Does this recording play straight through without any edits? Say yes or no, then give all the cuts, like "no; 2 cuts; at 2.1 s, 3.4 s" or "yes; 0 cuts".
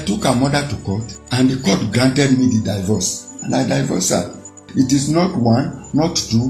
no; 2 cuts; at 1.2 s, 4.6 s